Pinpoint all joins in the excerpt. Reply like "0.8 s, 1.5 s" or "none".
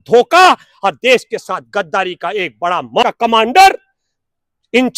3.0 s